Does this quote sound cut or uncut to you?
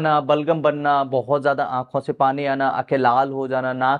uncut